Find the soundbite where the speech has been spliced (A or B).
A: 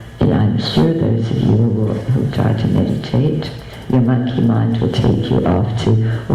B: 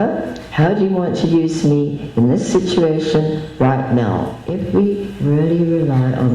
B